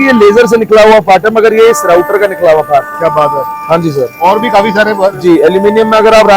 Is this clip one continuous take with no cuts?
yes; 0 cuts

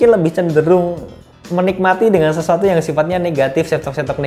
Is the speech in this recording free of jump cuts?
yes; 0 cuts

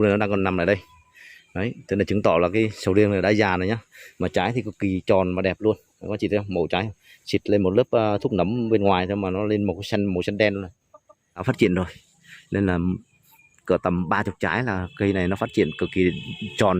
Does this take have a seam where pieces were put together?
yes; 1 cut; at 11.4 s

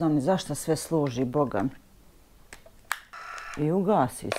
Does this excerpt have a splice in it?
yes; 1 cut; at 3.2 s

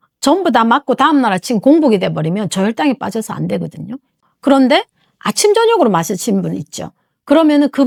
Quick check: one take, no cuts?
yes; 0 cuts

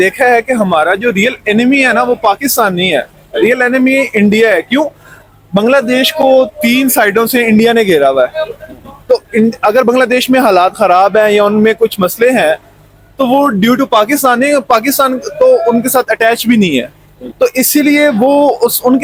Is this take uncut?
yes; 0 cuts

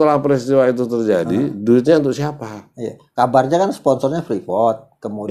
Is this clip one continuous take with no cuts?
yes; 0 cuts

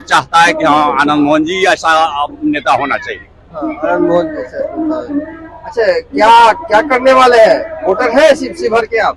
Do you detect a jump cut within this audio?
no; 0 cuts

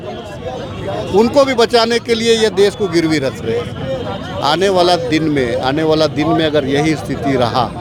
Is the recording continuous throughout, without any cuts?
yes; 0 cuts

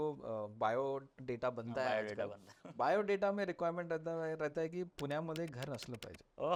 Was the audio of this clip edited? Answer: no; 0 cuts

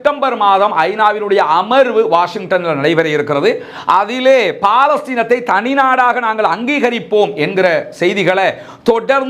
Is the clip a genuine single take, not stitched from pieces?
yes; 0 cuts

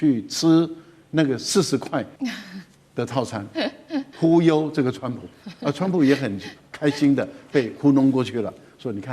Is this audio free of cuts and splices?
no; 2 cuts; at 2.1 s, 4.1 s

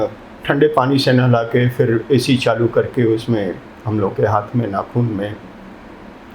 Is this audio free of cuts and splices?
yes; 0 cuts

